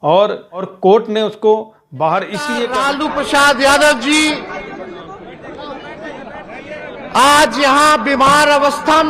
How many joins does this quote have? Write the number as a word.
one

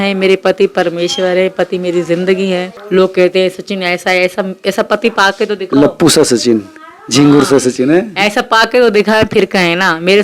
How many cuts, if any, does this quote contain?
one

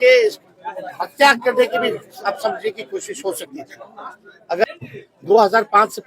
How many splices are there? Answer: one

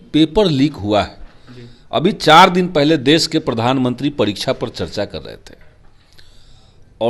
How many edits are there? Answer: zero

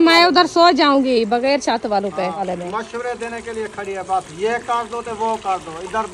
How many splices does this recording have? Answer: one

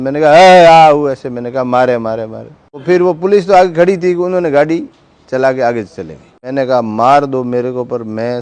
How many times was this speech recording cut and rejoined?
two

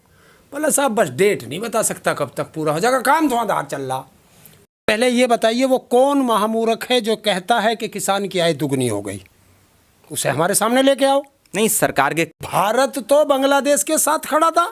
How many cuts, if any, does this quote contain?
two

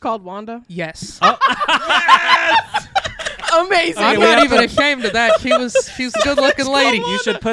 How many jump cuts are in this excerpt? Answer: zero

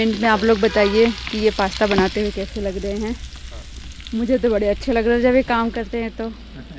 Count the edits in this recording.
zero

